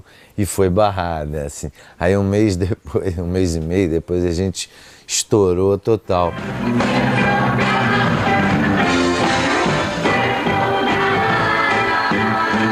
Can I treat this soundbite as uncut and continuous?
yes; 0 cuts

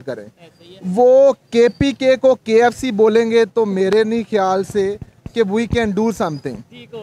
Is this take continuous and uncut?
yes; 0 cuts

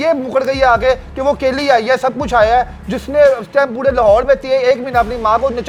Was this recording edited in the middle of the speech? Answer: no; 0 cuts

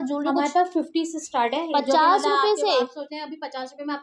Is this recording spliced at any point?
no; 0 cuts

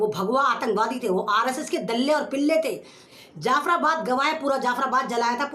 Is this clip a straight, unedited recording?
no; 1 cut; at 3.0 s

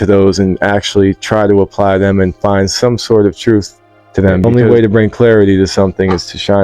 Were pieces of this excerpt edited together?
yes; 1 cut; at 4.4 s

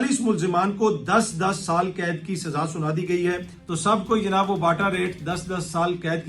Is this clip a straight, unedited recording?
no; 1 cut; at 3.6 s

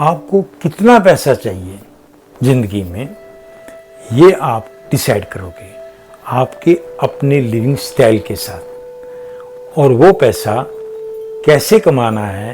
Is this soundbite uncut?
yes; 0 cuts

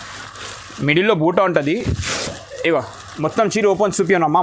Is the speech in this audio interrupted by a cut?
no; 0 cuts

